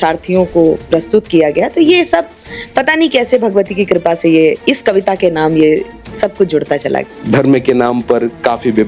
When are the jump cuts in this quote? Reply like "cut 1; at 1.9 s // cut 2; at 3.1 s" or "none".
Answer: cut 1; at 7.1 s